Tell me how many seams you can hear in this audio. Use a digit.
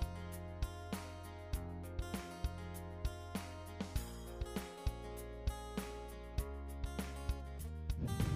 1